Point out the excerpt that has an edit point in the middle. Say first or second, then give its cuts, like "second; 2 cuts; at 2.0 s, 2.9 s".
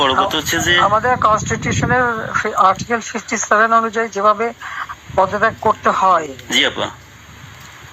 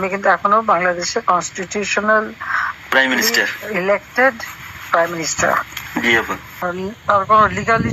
second; 1 cut; at 6.6 s